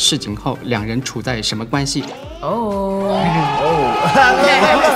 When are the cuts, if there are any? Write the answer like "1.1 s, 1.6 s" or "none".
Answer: 2.2 s